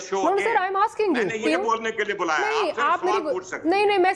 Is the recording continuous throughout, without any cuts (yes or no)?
no